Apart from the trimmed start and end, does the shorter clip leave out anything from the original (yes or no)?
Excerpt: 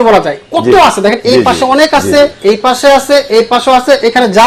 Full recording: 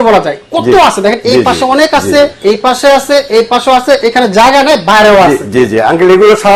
no